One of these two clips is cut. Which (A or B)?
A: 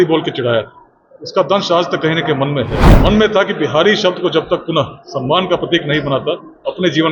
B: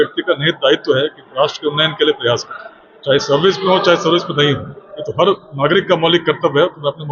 A